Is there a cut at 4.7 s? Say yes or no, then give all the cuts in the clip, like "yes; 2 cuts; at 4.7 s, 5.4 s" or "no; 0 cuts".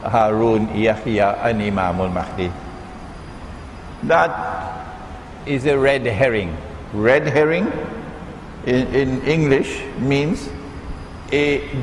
yes; 1 cut; at 4.7 s